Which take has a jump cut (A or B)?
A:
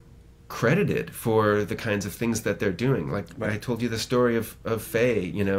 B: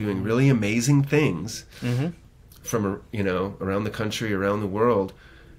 B